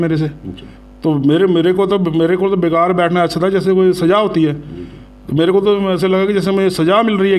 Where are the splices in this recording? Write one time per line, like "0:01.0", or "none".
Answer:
none